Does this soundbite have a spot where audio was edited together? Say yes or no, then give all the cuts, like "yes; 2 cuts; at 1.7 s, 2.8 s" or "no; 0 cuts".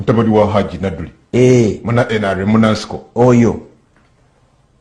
no; 0 cuts